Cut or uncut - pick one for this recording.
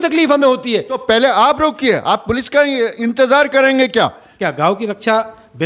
cut